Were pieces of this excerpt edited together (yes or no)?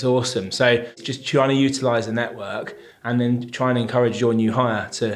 yes